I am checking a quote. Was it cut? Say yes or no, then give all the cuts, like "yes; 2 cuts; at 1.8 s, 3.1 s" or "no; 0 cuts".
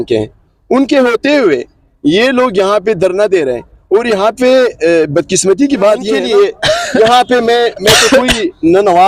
yes; 1 cut; at 6.2 s